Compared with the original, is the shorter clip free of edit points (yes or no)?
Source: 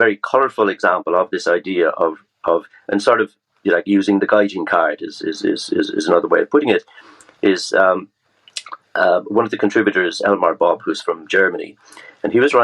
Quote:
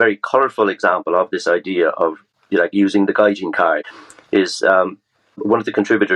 no